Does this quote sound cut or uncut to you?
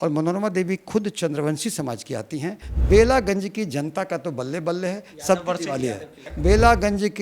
cut